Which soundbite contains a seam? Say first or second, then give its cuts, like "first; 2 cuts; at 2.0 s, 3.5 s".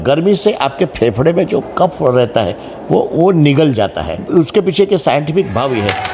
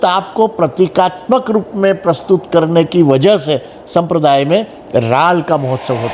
first; 2 cuts; at 1.7 s, 4.2 s